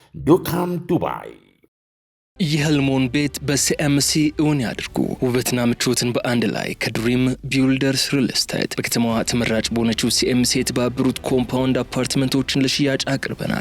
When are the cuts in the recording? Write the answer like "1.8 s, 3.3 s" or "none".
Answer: 2.3 s